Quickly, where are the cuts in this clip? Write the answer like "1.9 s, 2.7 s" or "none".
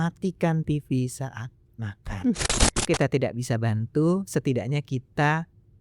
2.8 s